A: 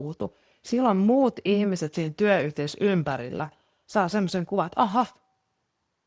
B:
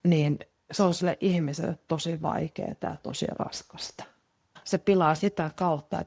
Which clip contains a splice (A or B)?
B